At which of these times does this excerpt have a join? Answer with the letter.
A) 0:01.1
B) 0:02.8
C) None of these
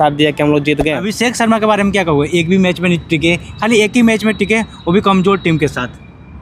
A